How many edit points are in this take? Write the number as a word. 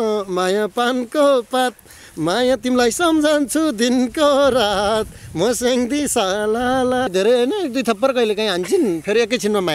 one